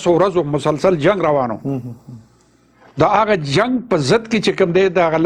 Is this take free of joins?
yes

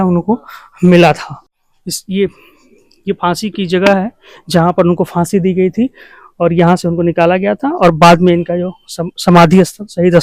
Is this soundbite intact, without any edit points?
yes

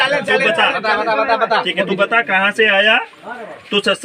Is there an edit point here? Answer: no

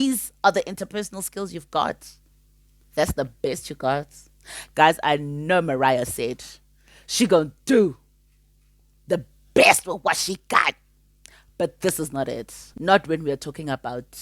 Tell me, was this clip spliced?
no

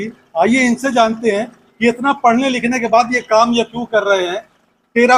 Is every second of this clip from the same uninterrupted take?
yes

